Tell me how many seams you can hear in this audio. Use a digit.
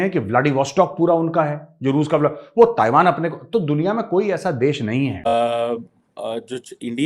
1